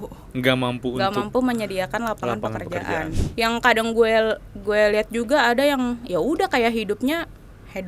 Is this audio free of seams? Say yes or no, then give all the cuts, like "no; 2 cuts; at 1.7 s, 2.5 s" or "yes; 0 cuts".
no; 1 cut; at 3.2 s